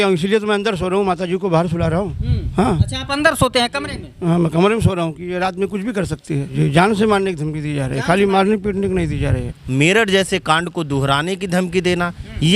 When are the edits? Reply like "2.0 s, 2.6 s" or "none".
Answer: 6.5 s, 9.5 s